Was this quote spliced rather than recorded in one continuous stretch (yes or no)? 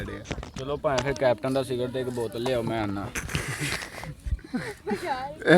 yes